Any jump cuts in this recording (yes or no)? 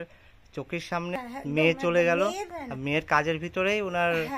yes